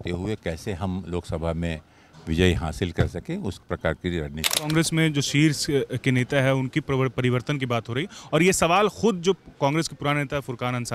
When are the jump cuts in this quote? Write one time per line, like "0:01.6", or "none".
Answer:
0:04.5